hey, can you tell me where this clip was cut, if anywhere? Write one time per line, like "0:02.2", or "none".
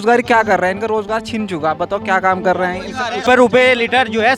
0:03.2